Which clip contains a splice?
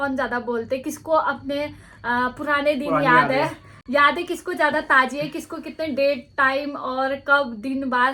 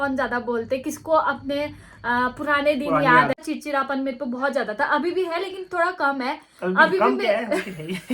second; 1 cut; at 3.3 s

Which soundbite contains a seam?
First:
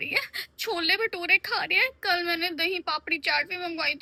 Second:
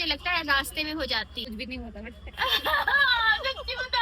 second; 1 cut; at 1.4 s

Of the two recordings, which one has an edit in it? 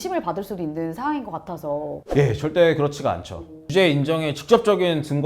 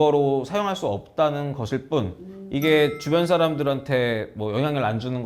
first; 2 cuts; at 2.0 s, 3.7 s

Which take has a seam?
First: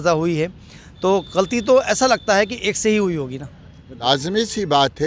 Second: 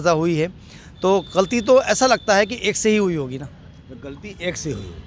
first; 1 cut; at 4.1 s

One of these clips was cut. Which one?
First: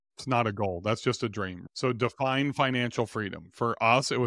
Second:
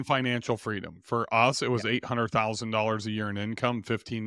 first; 1 cut; at 1.6 s

